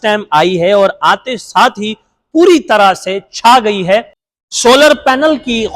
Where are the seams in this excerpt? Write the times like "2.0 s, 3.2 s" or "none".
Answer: 4.2 s